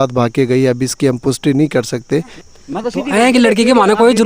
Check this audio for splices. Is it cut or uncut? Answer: cut